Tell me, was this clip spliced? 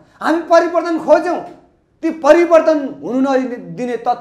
no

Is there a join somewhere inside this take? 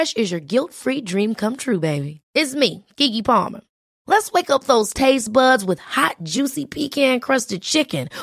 no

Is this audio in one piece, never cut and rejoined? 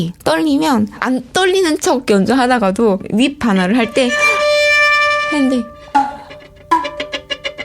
no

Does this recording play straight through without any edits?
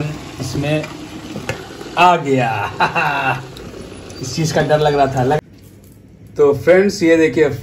no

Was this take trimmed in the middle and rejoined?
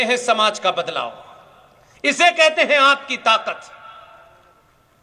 no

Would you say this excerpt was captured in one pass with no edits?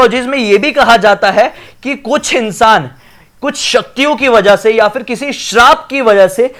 yes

